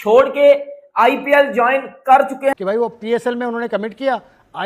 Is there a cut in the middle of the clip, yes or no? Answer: yes